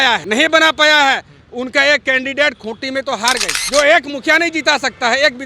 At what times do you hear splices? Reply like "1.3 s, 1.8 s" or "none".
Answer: 3.5 s